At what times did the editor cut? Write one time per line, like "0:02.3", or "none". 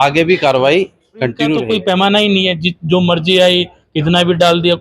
0:01.6